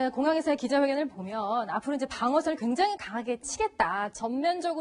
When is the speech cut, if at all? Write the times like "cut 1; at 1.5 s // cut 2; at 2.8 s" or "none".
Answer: cut 1; at 3.4 s